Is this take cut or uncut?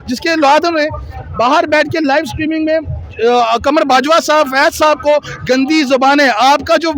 uncut